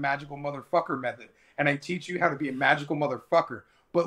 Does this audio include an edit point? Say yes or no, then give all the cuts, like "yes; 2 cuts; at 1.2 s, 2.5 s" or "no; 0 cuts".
no; 0 cuts